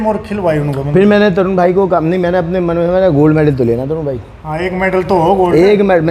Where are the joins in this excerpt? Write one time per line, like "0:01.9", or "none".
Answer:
none